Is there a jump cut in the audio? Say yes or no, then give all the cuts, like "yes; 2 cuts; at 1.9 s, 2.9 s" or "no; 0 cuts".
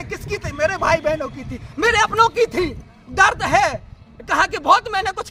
no; 0 cuts